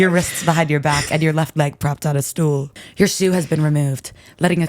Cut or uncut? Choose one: cut